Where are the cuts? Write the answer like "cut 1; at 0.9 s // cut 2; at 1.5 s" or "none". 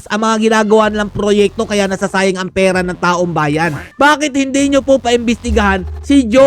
cut 1; at 3.9 s